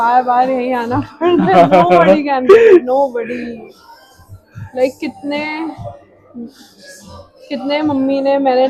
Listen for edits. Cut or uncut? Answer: uncut